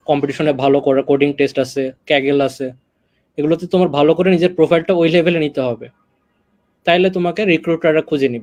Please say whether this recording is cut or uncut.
uncut